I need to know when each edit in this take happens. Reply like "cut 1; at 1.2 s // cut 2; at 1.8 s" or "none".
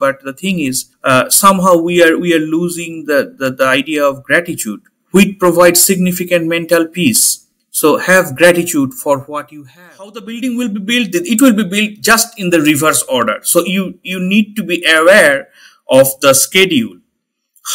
cut 1; at 9.4 s